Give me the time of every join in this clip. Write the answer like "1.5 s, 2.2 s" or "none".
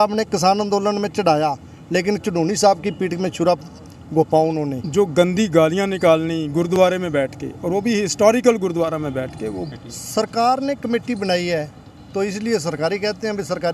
4.8 s, 9.7 s